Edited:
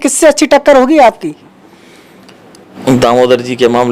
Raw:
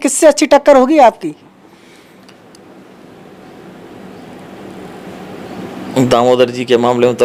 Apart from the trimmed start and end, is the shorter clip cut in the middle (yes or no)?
yes